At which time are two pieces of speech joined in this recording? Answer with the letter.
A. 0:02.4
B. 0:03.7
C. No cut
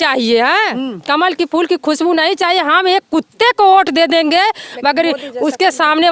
C